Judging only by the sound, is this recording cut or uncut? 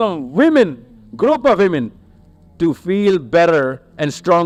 uncut